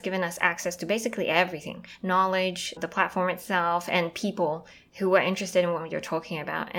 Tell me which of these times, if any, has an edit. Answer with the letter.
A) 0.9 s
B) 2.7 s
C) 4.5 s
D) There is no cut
B